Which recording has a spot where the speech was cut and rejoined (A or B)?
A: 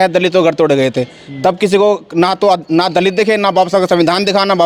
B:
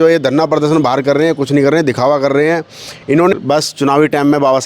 B